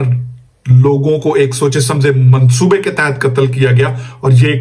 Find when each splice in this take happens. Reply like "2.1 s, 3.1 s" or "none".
none